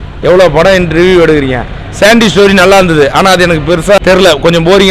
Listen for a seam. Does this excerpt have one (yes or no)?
yes